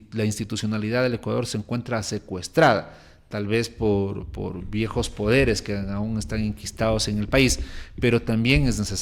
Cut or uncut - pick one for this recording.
uncut